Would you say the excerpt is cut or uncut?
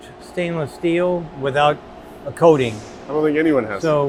uncut